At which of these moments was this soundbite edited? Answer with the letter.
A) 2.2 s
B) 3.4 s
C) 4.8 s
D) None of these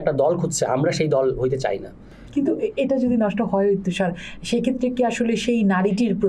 A